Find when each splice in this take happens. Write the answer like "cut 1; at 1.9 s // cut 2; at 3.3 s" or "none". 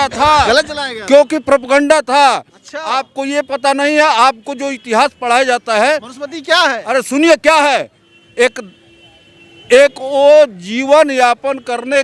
none